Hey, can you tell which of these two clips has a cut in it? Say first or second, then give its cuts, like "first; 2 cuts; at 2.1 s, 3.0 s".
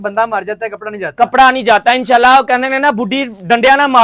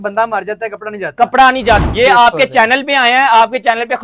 second; 1 cut; at 1.8 s